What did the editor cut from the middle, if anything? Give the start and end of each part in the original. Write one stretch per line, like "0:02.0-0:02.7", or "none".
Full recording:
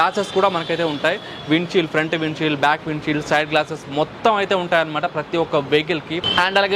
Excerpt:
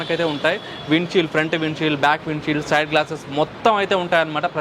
none